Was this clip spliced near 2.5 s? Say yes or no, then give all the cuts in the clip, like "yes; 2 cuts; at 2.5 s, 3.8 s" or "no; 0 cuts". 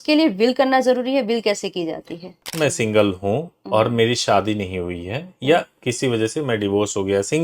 yes; 1 cut; at 2.5 s